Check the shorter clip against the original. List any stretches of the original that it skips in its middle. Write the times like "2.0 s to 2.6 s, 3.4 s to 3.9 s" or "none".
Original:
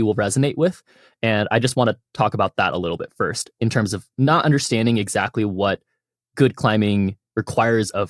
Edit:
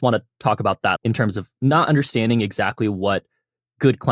2.7 s to 3.5 s